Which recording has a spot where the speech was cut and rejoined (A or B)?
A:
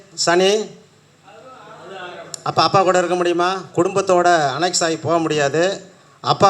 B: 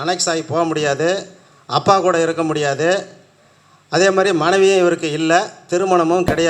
A